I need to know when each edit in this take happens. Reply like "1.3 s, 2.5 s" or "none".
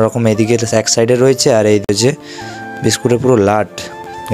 1.9 s